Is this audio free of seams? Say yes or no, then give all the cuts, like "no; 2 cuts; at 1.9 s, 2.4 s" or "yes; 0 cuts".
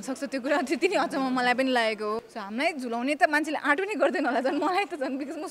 no; 1 cut; at 2.2 s